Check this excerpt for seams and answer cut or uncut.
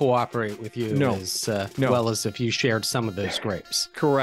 uncut